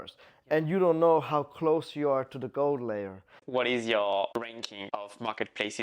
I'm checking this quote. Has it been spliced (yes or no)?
yes